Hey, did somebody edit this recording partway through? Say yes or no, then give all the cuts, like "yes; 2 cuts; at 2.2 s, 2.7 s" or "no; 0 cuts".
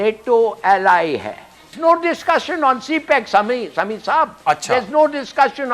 yes; 1 cut; at 1.7 s